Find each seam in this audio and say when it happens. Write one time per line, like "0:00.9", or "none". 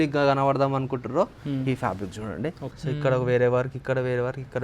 0:02.7

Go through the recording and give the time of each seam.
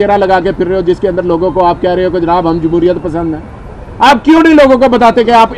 none

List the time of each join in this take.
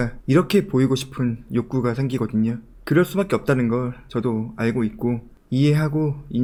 none

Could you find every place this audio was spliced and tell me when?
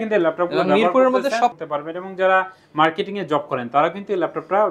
0:01.6

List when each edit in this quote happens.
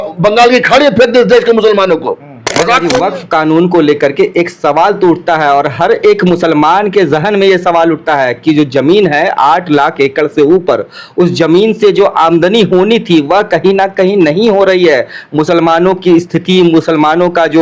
0:02.8

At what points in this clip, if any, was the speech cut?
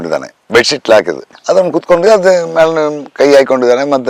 none

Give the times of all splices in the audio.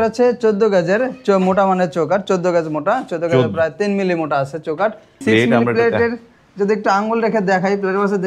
0:05.2

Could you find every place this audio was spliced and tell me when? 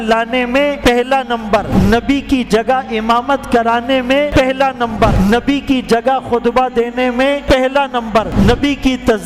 0:00.8
0:01.7
0:04.3
0:05.1
0:07.4
0:08.3

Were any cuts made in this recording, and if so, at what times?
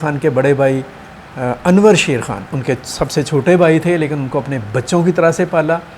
none

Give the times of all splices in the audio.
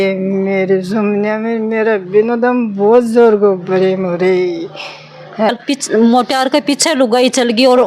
0:05.5

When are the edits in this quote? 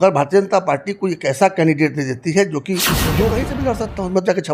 0:03.3

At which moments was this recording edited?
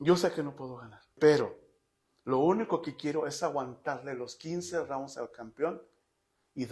0:01.1

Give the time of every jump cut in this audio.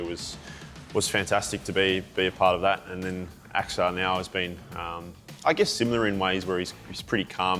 none

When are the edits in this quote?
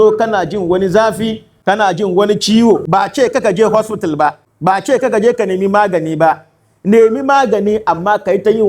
0:01.5
0:02.8
0:04.5

